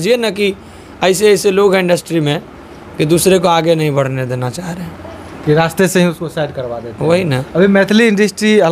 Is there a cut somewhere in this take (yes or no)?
no